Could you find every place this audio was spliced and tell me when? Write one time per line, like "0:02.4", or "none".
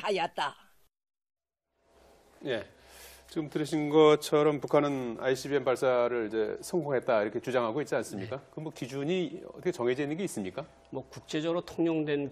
0:09.6